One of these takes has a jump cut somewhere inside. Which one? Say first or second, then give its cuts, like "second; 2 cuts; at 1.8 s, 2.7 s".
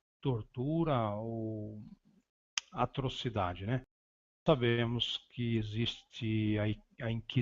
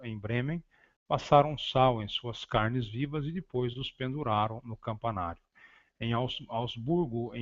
second; 1 cut; at 2.9 s